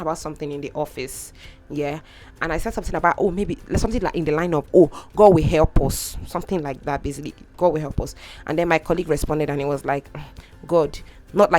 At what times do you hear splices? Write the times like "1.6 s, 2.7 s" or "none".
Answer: none

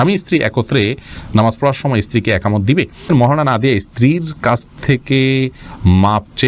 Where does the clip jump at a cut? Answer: 3.1 s

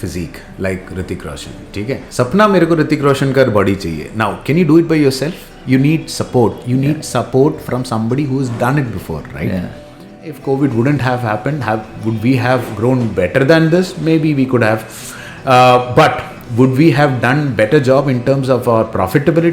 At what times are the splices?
2.1 s, 10.2 s

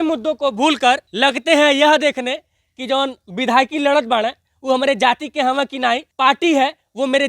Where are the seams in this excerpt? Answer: 1.1 s, 6.1 s

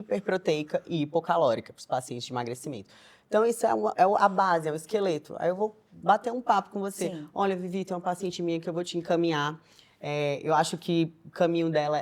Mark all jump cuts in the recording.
none

